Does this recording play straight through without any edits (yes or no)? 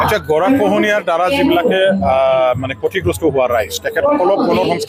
yes